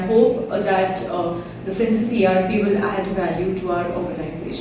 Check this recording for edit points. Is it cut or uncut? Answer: uncut